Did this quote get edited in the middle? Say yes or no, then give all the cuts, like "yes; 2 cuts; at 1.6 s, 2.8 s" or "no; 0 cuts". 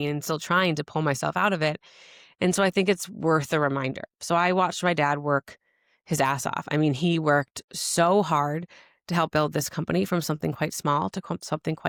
no; 0 cuts